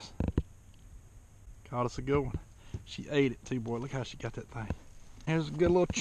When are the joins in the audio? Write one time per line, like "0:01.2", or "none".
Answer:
0:05.1